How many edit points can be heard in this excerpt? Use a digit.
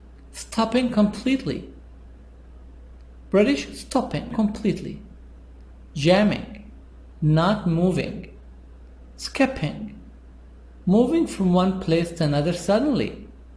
1